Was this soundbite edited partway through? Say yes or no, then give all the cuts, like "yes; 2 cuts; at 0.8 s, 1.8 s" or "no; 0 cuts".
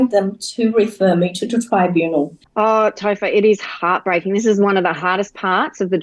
yes; 1 cut; at 2.4 s